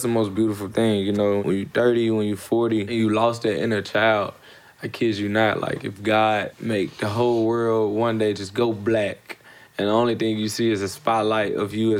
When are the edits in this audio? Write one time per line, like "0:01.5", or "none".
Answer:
0:01.4
0:02.9
0:06.5